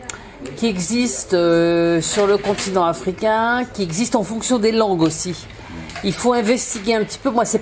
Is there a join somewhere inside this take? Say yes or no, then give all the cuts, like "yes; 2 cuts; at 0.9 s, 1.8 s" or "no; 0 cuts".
no; 0 cuts